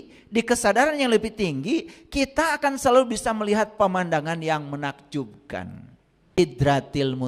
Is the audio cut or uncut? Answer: cut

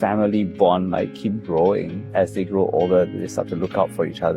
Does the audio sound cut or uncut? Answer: cut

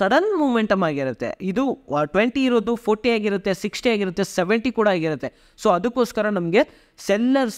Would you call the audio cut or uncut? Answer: uncut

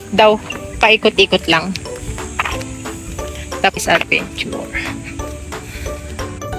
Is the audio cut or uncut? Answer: cut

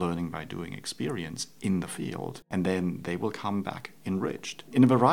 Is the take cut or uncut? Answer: uncut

